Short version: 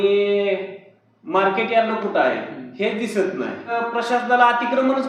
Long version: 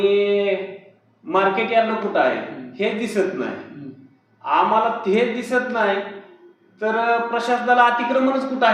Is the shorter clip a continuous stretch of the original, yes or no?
no